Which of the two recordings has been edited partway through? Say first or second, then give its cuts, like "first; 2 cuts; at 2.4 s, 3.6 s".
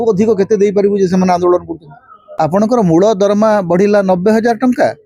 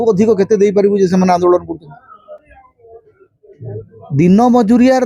first; 1 cut; at 2.7 s